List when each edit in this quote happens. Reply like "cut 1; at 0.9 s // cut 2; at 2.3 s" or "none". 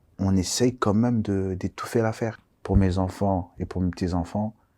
cut 1; at 2.5 s